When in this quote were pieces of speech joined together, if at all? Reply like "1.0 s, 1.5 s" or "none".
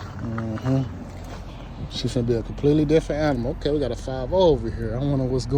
none

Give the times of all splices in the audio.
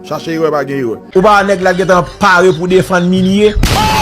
1.0 s

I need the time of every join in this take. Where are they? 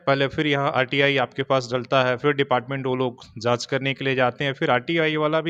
none

